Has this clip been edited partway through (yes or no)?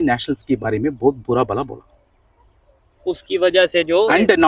no